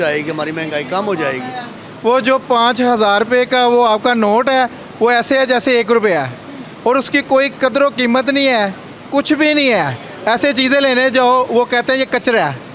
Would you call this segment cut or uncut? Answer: uncut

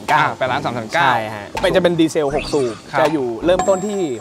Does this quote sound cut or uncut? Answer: cut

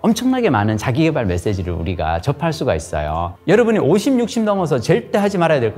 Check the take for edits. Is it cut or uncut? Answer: cut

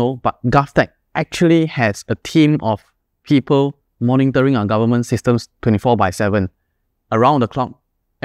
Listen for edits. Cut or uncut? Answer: uncut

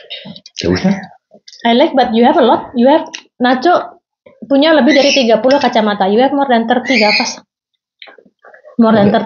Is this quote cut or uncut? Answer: uncut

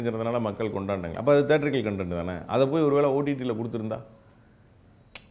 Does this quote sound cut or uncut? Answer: uncut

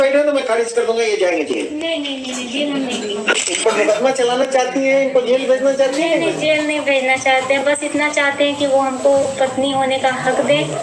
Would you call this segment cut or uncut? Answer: cut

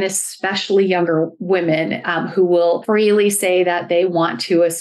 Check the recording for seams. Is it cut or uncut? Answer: cut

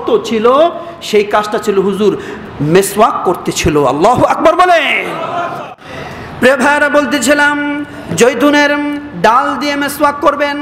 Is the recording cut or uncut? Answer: cut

